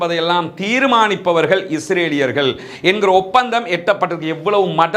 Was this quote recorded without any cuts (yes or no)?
yes